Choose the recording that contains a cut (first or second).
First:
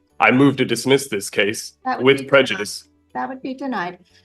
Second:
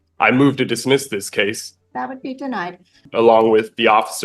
second